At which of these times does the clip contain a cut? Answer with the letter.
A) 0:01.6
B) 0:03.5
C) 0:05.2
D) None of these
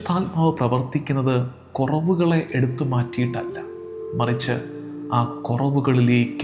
D